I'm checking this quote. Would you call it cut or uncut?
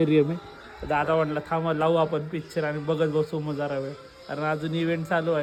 uncut